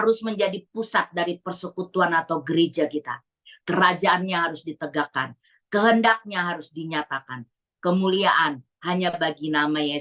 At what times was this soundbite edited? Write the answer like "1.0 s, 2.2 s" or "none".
none